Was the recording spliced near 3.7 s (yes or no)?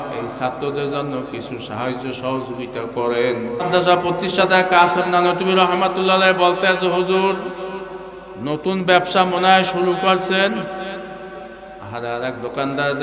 yes